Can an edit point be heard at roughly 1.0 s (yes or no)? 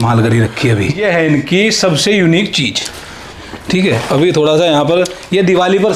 yes